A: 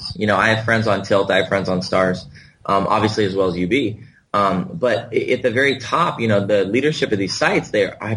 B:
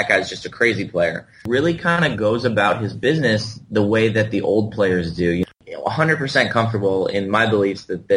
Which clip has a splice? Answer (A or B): B